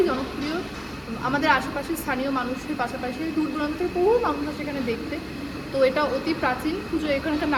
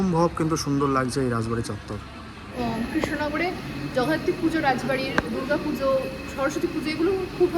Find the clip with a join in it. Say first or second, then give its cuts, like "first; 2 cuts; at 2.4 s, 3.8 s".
second; 1 cut; at 2.5 s